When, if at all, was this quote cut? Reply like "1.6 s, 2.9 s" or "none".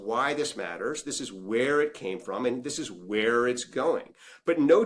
none

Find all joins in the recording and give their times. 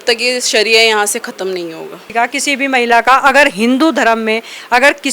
2.0 s

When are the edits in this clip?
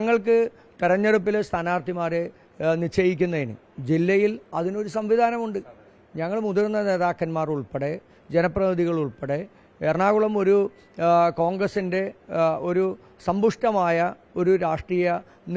none

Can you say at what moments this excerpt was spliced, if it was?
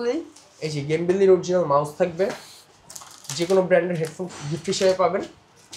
none

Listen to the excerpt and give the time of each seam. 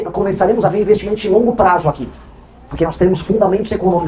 none

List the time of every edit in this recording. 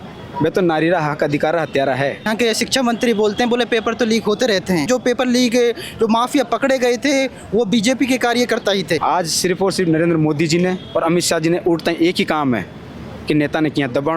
2.3 s, 4.8 s, 9.0 s

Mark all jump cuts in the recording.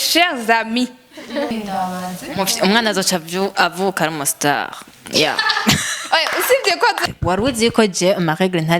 1.5 s, 7.0 s

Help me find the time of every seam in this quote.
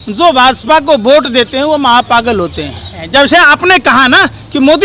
3.0 s

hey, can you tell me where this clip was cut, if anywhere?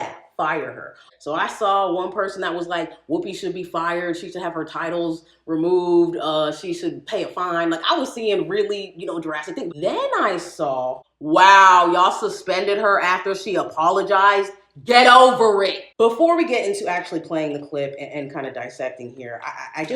1.1 s, 9.7 s, 11.1 s, 15.9 s

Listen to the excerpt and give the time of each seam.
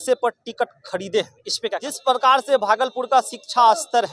1.9 s

